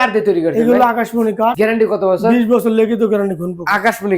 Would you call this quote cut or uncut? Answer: uncut